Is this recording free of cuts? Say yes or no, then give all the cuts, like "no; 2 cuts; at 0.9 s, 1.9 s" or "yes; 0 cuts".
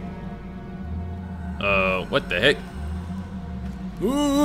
yes; 0 cuts